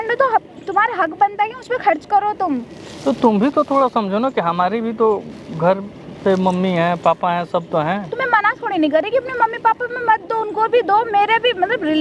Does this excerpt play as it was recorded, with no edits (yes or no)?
yes